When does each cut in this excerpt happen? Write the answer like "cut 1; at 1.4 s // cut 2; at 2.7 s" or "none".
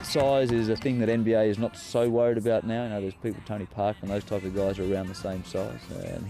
none